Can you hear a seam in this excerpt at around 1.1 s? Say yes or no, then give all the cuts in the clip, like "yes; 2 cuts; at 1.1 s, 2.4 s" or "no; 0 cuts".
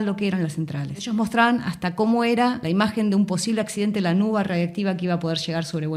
yes; 2 cuts; at 1.1 s, 2.6 s